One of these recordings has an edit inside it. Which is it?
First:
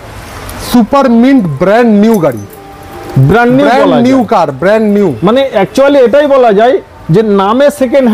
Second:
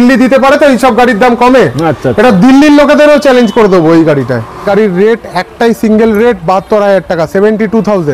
second; 1 cut; at 4.6 s

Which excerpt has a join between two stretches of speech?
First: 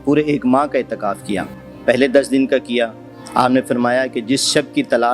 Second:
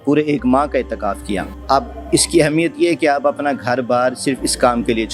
second; 1 cut; at 1.5 s

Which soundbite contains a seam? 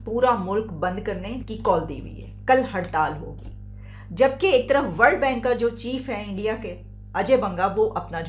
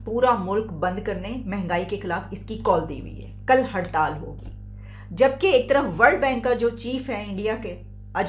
first; 1 cut; at 1.4 s

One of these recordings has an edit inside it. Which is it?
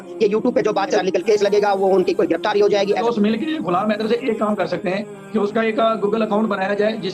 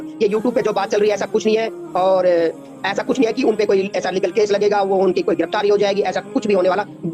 first; 2 cuts; at 1.0 s, 3.0 s

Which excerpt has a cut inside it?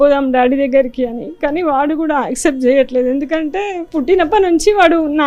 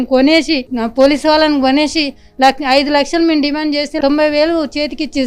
first; 1 cut; at 3.8 s

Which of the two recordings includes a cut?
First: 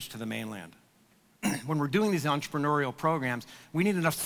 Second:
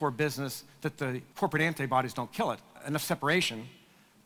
second; 2 cuts; at 1.3 s, 2.7 s

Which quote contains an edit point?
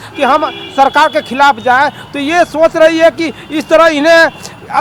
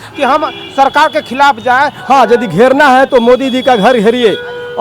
second; 1 cut; at 2.0 s

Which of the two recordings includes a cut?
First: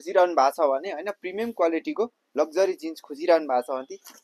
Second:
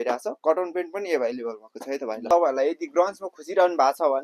second; 1 cut; at 2.3 s

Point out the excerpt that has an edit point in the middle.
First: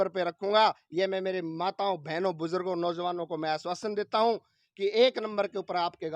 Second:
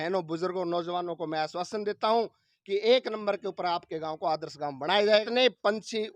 second; 1 cut; at 5.0 s

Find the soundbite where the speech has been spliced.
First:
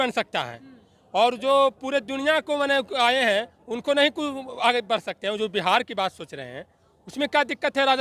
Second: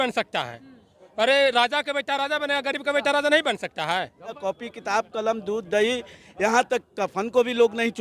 second; 2 cuts; at 0.9 s, 4.4 s

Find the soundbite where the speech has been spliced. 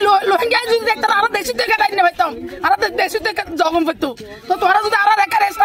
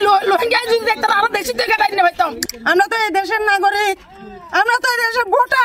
second; 1 cut; at 2.4 s

